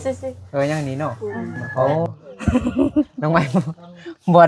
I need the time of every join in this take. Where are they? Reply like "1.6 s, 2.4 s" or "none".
2.0 s